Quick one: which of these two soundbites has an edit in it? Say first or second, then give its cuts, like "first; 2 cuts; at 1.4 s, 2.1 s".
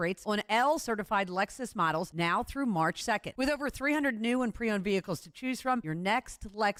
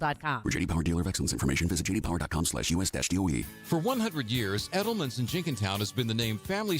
second; 1 cut; at 3.4 s